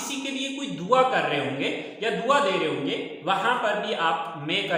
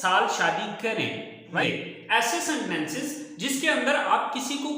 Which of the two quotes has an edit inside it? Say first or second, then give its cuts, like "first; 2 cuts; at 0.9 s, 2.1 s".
second; 1 cut; at 1.6 s